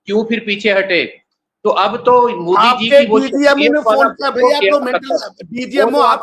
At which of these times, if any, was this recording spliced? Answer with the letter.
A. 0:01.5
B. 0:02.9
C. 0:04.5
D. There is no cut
D